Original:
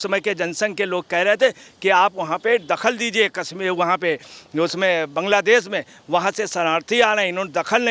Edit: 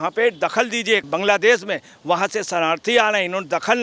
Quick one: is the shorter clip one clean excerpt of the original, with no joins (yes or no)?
no